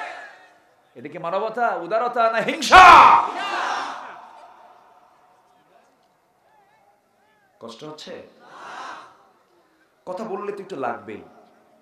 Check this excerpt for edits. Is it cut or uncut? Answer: uncut